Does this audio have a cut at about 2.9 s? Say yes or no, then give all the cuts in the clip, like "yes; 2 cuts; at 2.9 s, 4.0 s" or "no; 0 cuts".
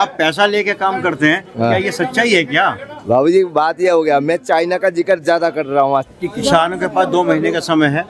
no; 1 cut; at 6.1 s